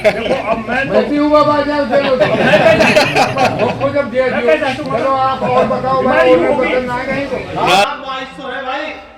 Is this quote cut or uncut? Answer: cut